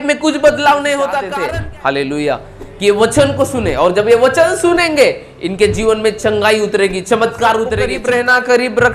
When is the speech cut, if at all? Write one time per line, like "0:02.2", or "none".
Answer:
0:01.3
0:07.9

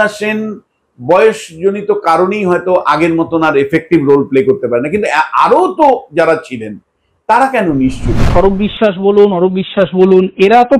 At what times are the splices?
0:08.2

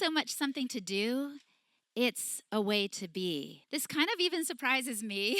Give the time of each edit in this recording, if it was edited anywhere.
0:03.6

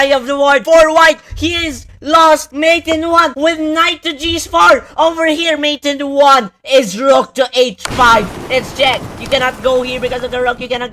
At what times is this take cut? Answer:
none

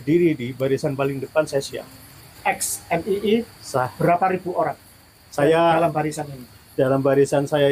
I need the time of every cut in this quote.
0:02.3

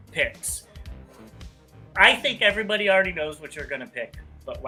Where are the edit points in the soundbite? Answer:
none

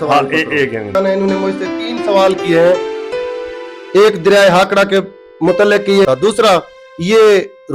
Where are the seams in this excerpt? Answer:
0:00.9
0:06.1

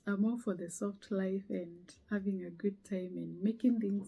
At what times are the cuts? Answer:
none

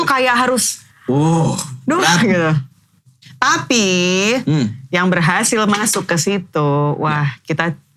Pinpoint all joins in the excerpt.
none

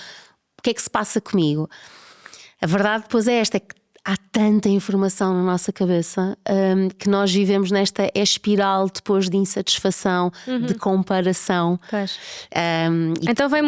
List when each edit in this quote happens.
none

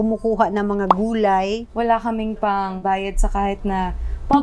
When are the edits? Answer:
0:01.7
0:02.8

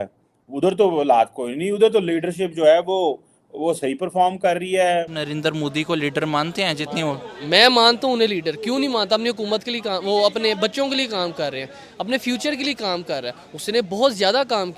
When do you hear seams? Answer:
0:05.2

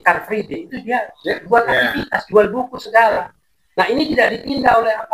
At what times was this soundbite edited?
none

